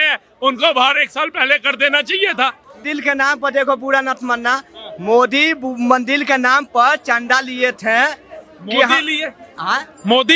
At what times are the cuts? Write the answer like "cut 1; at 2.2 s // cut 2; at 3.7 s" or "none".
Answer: cut 1; at 2.8 s